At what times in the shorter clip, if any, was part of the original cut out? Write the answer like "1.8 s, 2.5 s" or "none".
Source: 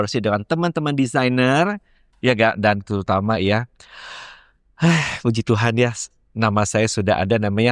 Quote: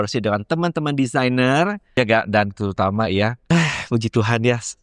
1.8 s, 3.4 s